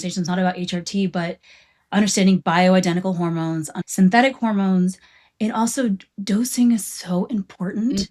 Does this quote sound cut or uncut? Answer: cut